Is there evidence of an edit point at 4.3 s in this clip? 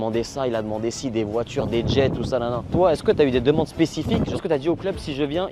yes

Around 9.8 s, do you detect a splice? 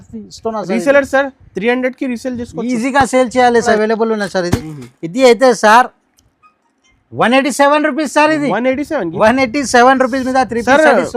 no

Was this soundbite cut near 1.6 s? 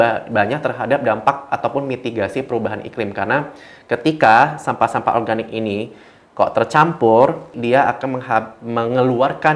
no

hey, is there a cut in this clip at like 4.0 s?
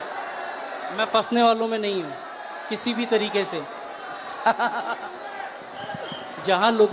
no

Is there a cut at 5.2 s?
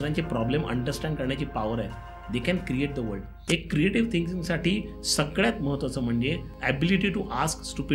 no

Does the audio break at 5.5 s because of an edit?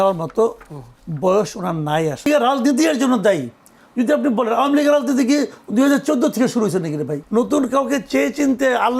no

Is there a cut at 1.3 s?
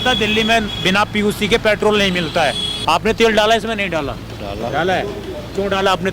no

